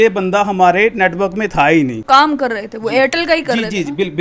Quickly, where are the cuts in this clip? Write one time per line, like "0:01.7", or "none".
0:02.0